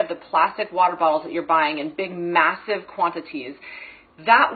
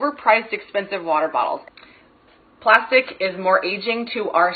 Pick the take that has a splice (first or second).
second